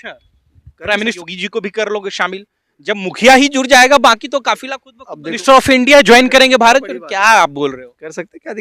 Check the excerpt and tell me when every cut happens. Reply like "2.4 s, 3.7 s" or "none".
1.2 s, 5.4 s